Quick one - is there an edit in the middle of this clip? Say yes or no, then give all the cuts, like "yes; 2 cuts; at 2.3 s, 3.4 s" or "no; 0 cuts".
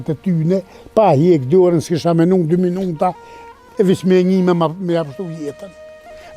no; 0 cuts